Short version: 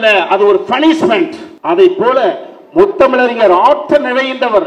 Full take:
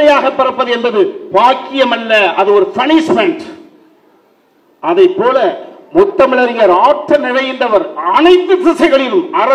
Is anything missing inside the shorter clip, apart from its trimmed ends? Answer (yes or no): yes